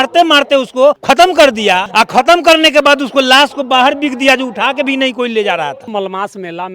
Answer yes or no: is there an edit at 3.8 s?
no